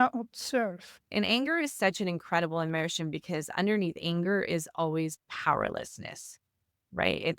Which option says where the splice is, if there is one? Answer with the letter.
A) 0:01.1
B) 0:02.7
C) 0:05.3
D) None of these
A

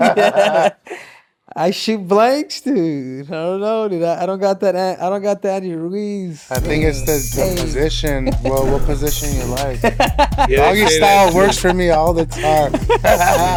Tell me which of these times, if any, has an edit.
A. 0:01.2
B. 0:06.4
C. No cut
C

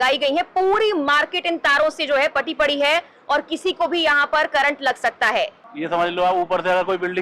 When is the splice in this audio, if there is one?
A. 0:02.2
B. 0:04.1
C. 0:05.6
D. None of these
C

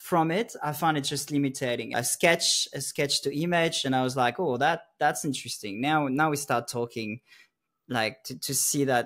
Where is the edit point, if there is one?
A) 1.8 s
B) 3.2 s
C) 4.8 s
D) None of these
A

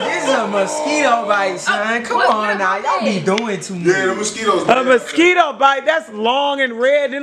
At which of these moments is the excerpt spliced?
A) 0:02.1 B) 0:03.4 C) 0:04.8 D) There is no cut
D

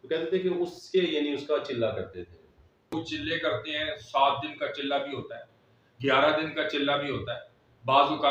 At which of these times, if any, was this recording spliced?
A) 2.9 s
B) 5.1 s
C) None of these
A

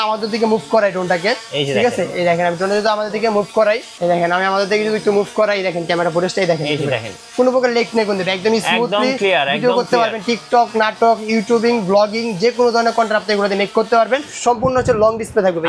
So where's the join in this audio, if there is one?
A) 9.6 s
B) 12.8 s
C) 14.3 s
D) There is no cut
C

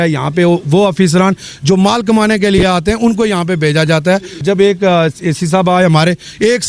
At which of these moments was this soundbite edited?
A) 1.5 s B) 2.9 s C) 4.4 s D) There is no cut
C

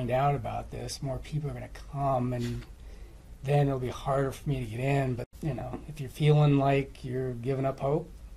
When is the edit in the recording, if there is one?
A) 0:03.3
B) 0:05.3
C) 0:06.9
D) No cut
B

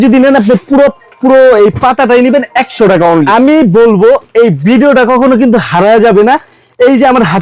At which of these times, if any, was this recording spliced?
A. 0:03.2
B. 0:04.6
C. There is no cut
A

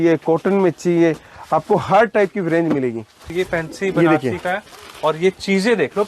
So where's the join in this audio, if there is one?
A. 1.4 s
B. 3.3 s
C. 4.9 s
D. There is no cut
B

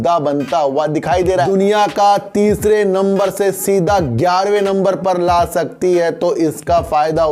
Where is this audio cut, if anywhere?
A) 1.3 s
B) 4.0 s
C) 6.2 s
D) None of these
A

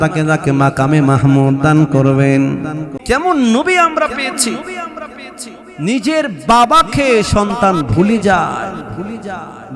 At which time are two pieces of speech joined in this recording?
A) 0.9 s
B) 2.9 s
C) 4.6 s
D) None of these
B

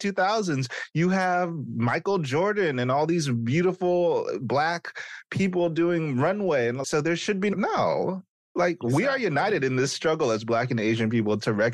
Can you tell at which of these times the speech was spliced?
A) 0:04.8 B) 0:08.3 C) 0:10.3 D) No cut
D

